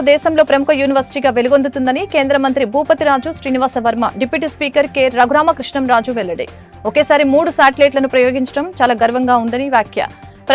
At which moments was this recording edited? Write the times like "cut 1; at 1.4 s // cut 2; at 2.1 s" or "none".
none